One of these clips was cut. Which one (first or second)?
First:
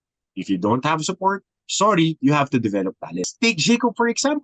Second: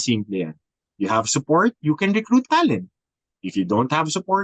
first